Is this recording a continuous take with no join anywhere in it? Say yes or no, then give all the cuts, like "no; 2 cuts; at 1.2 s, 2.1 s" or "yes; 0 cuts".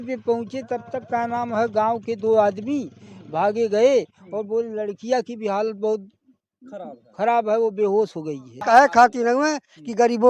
no; 1 cut; at 8.5 s